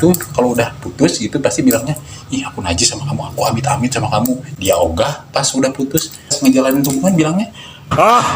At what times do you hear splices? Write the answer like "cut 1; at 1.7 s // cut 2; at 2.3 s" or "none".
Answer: cut 1; at 4.5 s // cut 2; at 6.4 s